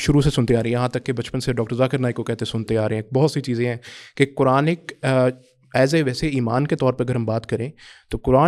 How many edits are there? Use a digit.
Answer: 0